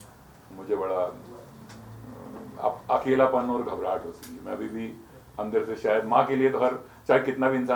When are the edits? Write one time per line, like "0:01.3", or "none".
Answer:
none